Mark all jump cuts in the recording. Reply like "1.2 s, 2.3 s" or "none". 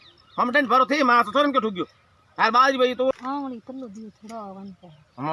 3.1 s